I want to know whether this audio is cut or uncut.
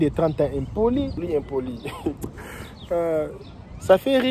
cut